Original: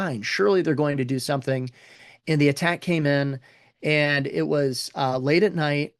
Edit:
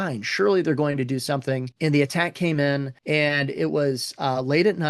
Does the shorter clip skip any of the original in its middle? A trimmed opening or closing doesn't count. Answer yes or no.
yes